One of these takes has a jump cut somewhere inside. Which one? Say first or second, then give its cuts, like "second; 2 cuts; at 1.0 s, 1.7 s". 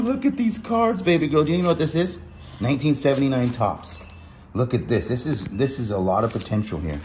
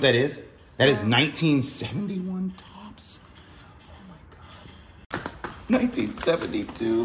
second; 1 cut; at 5.1 s